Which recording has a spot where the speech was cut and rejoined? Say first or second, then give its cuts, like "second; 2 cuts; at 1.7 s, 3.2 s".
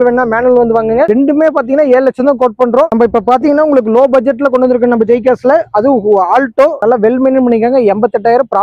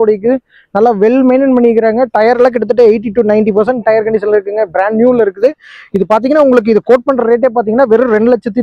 first; 3 cuts; at 1.1 s, 2.9 s, 6.8 s